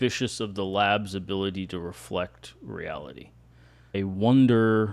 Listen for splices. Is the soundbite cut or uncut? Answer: cut